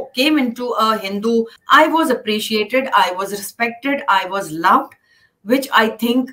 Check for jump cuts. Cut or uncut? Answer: cut